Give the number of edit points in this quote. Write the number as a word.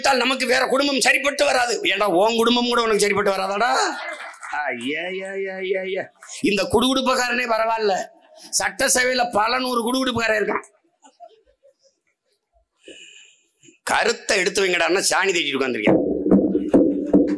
zero